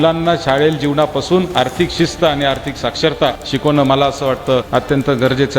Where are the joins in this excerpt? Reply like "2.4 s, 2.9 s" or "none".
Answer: 3.4 s, 4.7 s